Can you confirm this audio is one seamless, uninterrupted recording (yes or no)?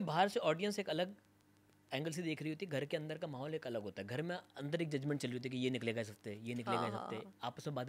yes